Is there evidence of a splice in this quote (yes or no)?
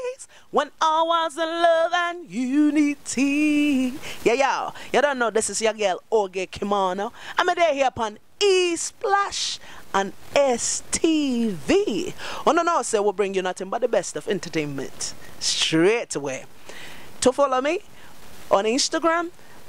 no